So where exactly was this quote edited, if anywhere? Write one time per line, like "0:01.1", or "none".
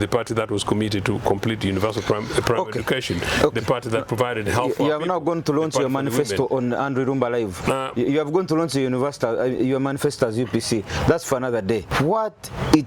0:11.9